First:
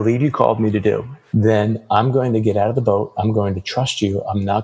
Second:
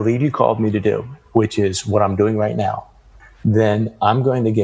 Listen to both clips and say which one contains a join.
first; 1 cut; at 1.1 s

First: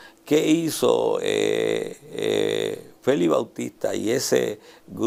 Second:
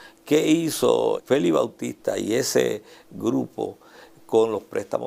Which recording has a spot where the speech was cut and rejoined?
second; 1 cut; at 1.2 s

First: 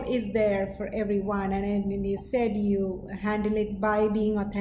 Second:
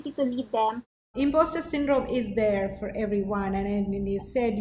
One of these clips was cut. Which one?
second; 1 cut; at 1.1 s

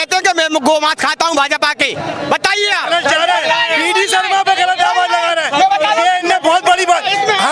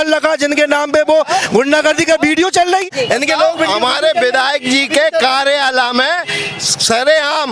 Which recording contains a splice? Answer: second; 1 cut; at 2.9 s

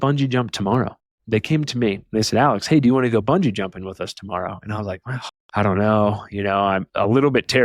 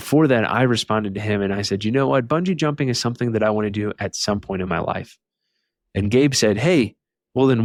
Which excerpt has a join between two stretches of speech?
first; 2 cuts; at 1.1 s, 6.9 s

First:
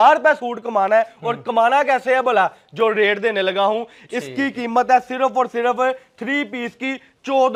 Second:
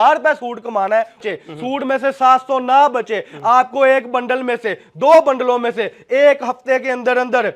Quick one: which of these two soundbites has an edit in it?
second; 1 cut; at 1.3 s

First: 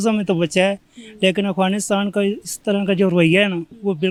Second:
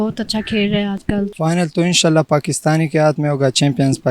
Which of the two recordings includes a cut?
second; 1 cut; at 1.0 s

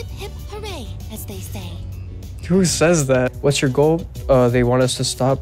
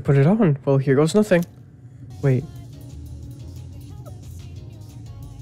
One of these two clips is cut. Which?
first; 1 cut; at 3.3 s

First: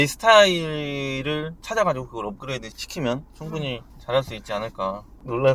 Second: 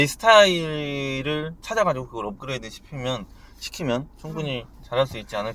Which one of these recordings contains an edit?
first; 1 cut; at 2.8 s

